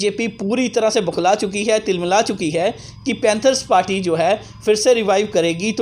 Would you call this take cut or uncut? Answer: uncut